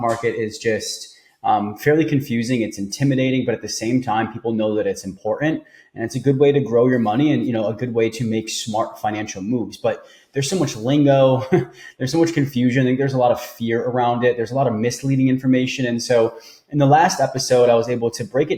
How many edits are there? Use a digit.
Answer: 0